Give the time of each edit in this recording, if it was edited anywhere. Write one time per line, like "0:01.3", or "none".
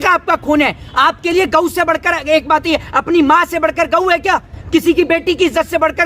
none